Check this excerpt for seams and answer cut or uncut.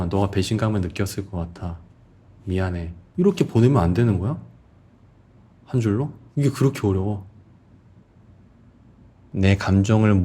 cut